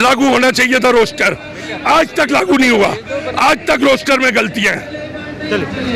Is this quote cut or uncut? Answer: uncut